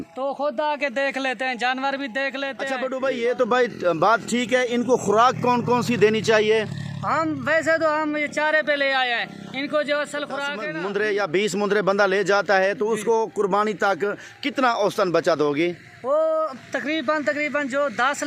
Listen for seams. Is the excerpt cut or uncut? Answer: cut